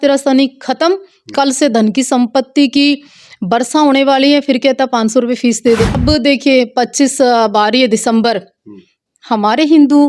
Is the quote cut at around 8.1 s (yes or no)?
no